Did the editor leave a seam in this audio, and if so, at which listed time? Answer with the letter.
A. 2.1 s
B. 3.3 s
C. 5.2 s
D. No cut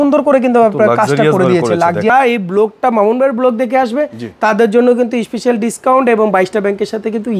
A